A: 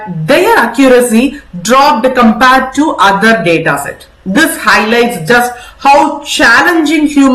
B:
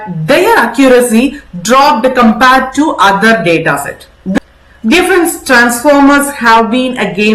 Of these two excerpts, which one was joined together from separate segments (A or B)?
B